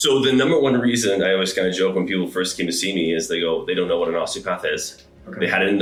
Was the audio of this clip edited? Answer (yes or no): no